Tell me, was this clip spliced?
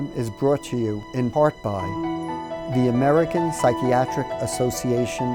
no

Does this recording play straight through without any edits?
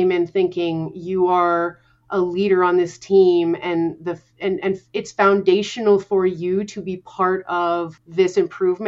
no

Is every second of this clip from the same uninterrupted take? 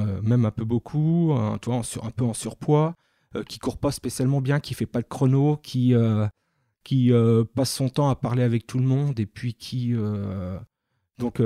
yes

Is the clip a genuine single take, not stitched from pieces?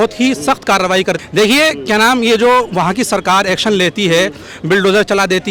yes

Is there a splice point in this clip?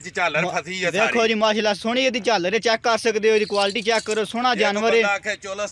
no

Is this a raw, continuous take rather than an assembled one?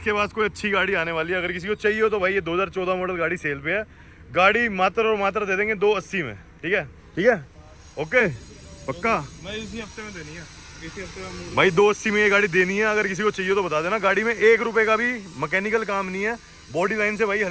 yes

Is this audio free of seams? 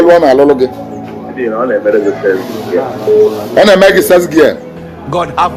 yes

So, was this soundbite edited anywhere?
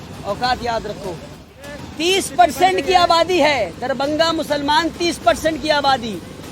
yes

